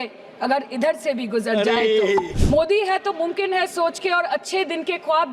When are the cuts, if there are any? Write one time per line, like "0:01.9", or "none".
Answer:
0:02.3